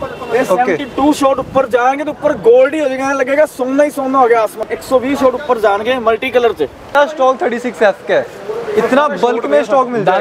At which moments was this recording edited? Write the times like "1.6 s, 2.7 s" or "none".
4.6 s, 6.9 s